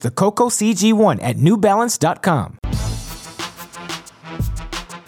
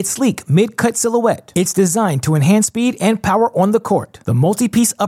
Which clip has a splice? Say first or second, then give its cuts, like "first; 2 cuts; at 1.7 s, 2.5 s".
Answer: first; 2 cuts; at 2.6 s, 4.2 s